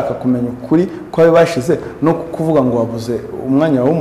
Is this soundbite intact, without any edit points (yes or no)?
yes